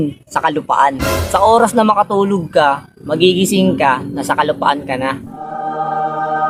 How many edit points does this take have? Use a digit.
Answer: 0